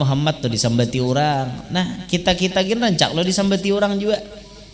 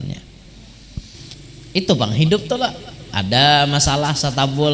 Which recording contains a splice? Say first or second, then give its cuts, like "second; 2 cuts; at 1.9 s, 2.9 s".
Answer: second; 1 cut; at 1.3 s